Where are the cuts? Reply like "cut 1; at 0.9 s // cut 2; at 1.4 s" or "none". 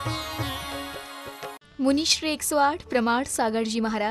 cut 1; at 1.7 s